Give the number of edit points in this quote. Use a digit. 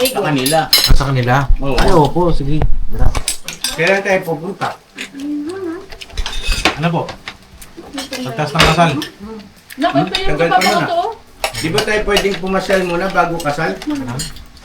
1